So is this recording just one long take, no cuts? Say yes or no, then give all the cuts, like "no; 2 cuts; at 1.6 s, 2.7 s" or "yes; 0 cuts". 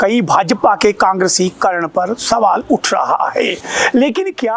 yes; 0 cuts